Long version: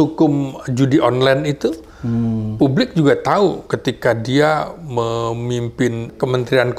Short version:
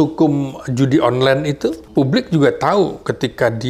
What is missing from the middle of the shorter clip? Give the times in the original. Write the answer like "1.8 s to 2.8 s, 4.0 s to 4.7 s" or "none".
1.8 s to 2.5 s